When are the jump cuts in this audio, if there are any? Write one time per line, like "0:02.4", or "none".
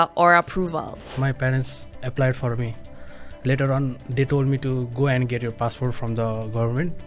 0:01.0
0:02.9